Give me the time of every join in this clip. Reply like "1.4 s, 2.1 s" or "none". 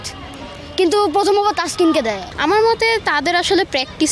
2.3 s